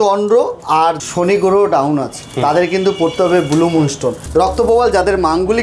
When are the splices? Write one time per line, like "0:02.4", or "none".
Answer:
0:01.0
0:04.2

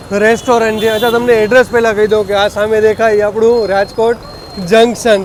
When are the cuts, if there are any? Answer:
none

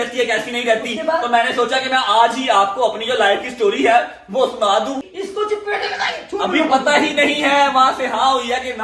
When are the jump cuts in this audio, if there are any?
0:05.1

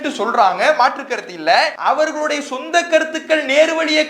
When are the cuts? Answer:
0:01.7

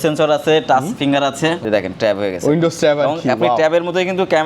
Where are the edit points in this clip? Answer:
0:01.6

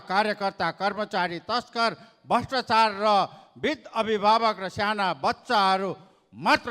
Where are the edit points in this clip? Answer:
none

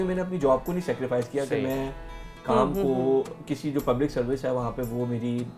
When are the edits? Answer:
none

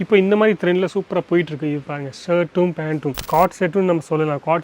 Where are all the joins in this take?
0:03.2

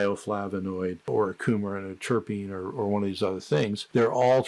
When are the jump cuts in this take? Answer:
0:01.0

